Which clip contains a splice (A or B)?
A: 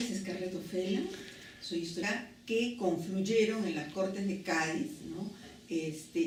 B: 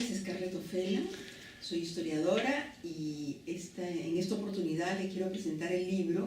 B